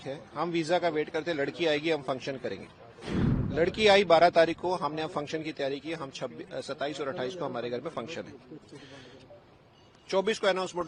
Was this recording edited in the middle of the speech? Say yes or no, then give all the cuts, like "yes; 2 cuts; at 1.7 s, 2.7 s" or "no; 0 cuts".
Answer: no; 0 cuts